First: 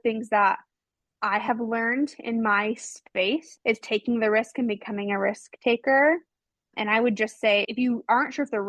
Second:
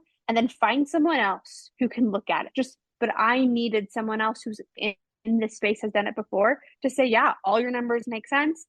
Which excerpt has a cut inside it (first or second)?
second